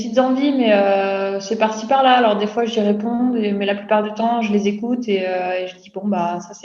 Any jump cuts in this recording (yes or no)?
no